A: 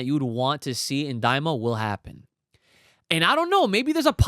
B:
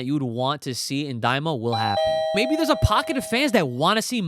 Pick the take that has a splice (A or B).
B